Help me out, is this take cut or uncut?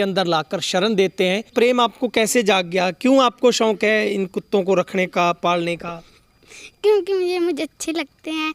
cut